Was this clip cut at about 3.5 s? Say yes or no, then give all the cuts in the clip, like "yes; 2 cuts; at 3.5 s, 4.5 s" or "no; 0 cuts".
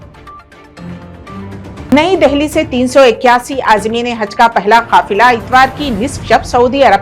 no; 1 cut; at 1.9 s